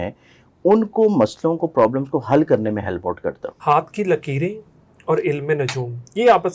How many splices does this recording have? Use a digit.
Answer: 1